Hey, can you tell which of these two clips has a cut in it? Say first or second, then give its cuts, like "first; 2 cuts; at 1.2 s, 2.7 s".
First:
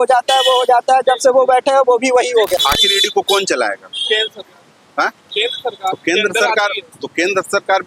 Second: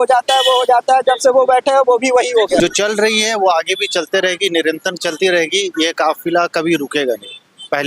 second; 1 cut; at 2.6 s